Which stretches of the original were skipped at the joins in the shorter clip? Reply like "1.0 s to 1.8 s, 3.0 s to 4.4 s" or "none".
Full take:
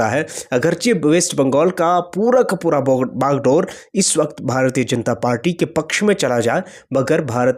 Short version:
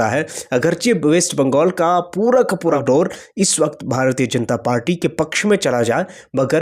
2.8 s to 3.4 s